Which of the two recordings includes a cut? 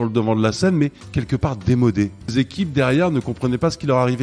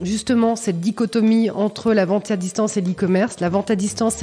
first; 2 cuts; at 1.1 s, 2.3 s

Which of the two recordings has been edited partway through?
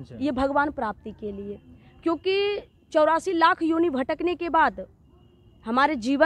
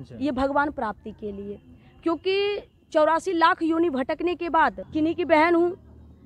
second; 1 cut; at 4.8 s

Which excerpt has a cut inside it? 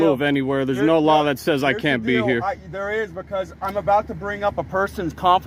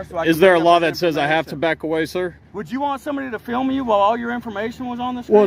second; 1 cut; at 2.5 s

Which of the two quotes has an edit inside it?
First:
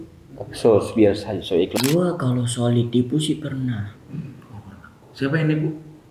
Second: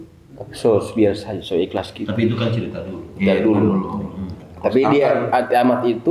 first; 1 cut; at 1.8 s

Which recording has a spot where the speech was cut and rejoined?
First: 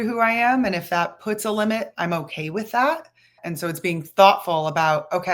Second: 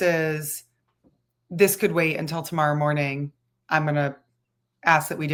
first; 1 cut; at 3.4 s

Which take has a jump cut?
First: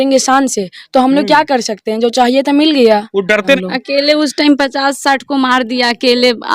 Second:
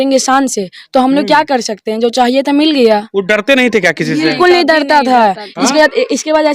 first; 1 cut; at 3.6 s

